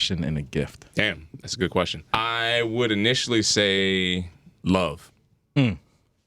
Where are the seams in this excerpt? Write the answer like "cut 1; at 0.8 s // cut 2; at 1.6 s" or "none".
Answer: cut 1; at 2.0 s // cut 2; at 4.4 s